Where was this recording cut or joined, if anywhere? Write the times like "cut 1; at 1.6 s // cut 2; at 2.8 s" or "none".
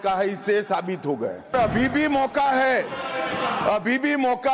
cut 1; at 1.5 s